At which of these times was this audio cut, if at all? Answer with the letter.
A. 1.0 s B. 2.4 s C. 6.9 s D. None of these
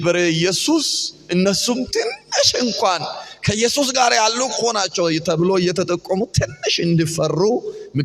D